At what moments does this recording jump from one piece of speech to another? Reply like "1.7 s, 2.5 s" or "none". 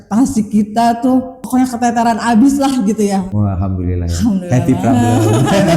1.4 s, 3.3 s